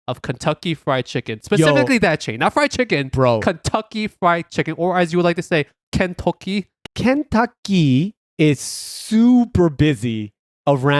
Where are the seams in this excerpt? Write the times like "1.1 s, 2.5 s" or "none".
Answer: 5.8 s, 6.8 s, 8.2 s